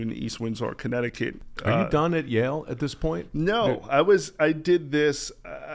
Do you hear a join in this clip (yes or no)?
yes